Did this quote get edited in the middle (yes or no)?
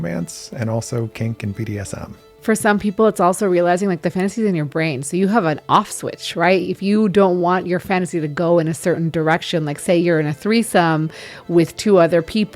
yes